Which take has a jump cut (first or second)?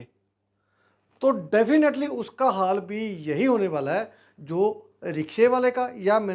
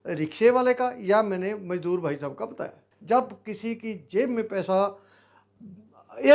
second